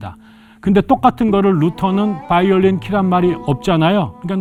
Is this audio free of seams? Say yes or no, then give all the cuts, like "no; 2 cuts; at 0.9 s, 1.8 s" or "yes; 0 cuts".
yes; 0 cuts